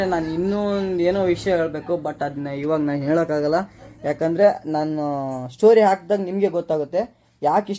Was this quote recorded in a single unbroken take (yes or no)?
yes